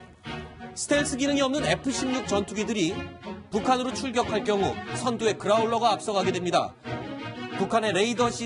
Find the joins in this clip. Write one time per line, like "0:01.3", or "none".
0:01.9